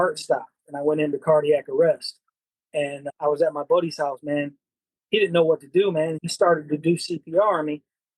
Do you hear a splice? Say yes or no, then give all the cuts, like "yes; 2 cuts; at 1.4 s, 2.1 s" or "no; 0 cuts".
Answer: yes; 2 cuts; at 3.0 s, 6.2 s